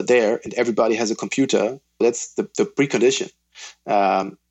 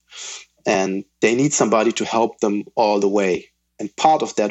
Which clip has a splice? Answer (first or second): first